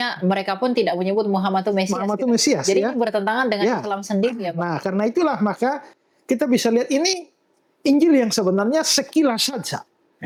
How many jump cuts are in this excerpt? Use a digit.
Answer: 0